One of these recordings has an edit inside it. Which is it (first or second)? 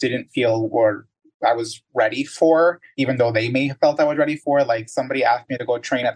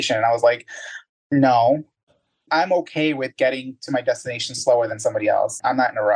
second